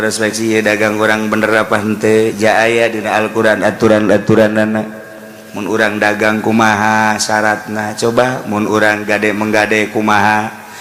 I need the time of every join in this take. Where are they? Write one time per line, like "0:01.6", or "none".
none